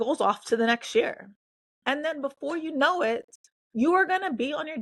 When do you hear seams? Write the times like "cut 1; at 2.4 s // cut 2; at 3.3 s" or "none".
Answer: none